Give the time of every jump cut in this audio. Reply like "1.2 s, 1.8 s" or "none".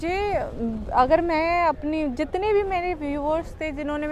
none